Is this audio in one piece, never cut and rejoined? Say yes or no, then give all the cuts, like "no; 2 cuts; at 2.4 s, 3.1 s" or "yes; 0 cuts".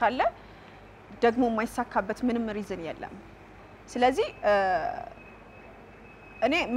yes; 0 cuts